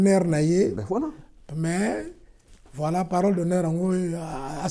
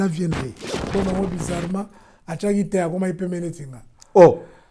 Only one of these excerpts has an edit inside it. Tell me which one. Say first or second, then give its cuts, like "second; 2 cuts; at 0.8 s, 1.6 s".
second; 1 cut; at 0.9 s